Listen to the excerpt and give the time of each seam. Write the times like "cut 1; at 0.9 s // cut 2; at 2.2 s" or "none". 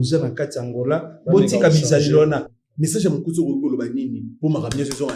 cut 1; at 2.6 s